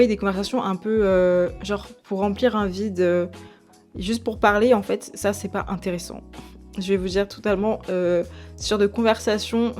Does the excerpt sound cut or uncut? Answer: uncut